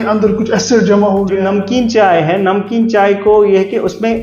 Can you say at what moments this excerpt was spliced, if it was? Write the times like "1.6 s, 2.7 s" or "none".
1.4 s